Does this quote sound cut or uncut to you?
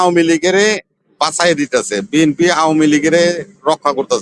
uncut